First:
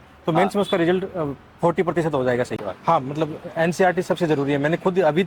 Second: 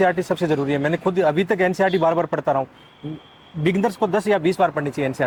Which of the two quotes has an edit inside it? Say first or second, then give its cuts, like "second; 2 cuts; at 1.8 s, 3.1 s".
first; 1 cut; at 2.6 s